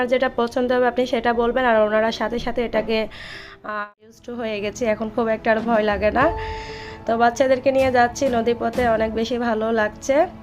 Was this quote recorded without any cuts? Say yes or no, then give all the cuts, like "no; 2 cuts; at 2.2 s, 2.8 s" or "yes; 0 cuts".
no; 1 cut; at 4.2 s